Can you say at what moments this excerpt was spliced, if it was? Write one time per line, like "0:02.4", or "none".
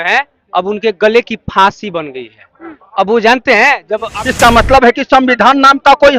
0:04.1